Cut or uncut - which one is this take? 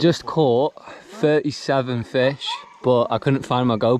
uncut